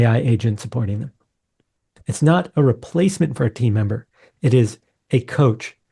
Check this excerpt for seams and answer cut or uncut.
uncut